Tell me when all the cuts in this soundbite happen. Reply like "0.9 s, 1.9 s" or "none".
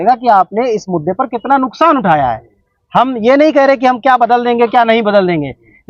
none